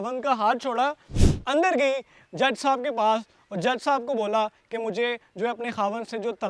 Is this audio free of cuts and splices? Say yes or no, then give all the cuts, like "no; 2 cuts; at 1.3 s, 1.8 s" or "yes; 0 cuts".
yes; 0 cuts